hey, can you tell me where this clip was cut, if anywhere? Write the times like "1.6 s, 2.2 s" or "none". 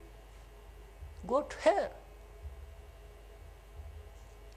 none